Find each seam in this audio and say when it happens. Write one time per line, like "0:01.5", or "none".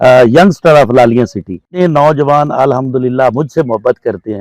0:01.6